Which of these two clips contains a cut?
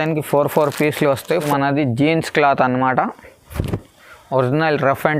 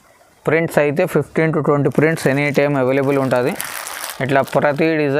first; 1 cut; at 1.5 s

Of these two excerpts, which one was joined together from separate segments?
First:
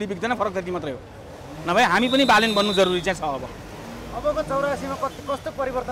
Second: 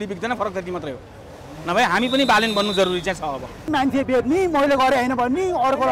second; 1 cut; at 3.7 s

